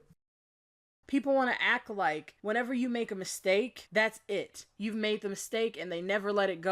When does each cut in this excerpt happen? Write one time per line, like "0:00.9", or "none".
0:01.0